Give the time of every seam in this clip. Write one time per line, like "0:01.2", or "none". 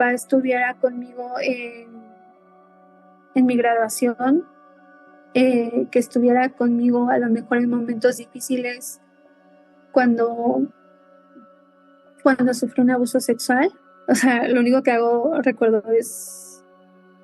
0:13.9